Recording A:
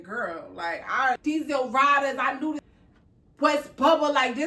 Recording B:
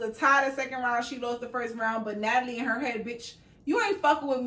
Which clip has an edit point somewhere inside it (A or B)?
A